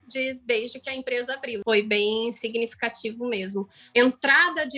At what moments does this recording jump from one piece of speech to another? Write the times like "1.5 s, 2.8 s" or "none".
1.6 s, 3.8 s